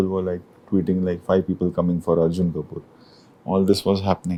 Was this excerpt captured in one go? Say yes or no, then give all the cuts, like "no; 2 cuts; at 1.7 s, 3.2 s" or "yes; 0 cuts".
yes; 0 cuts